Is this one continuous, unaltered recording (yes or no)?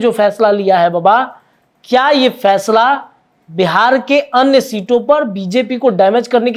yes